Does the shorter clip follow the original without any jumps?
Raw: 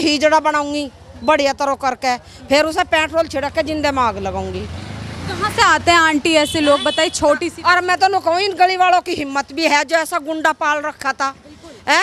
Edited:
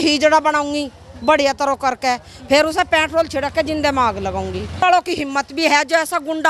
no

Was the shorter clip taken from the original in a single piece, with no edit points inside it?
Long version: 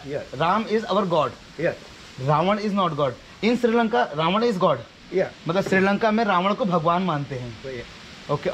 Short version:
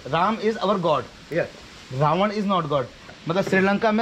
no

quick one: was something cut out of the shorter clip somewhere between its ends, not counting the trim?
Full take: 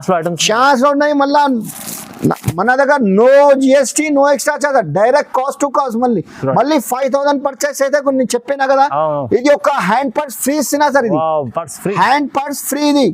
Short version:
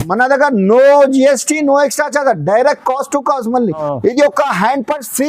yes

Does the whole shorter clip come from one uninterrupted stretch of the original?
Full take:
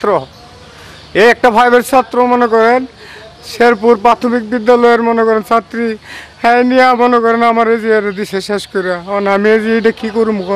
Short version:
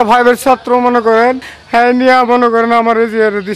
no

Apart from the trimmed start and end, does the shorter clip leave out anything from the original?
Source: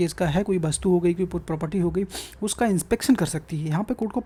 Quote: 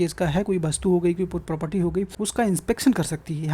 yes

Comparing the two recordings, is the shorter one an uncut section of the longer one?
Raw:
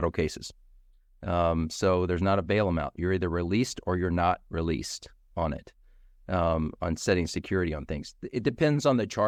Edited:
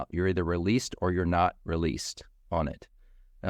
yes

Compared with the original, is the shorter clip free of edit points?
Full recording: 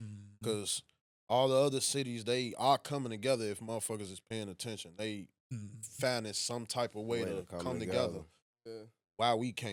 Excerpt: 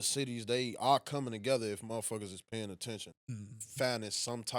no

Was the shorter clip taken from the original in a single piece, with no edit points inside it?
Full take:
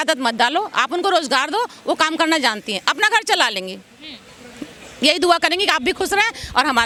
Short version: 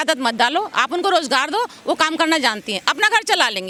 yes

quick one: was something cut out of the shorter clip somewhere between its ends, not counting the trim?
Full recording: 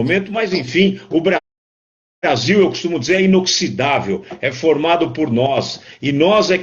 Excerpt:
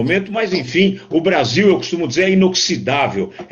yes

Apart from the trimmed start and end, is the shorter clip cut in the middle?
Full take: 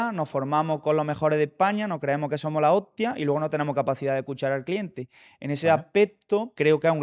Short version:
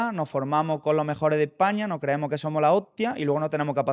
no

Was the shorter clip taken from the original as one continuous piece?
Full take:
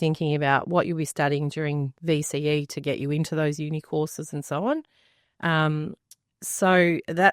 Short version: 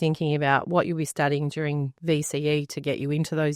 yes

